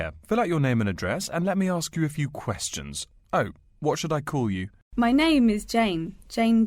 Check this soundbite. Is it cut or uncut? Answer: cut